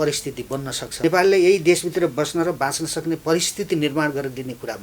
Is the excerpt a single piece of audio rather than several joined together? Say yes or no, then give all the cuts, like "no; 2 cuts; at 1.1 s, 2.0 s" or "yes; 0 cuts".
no; 1 cut; at 1.0 s